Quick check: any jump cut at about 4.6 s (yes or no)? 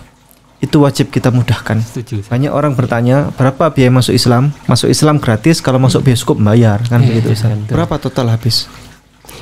yes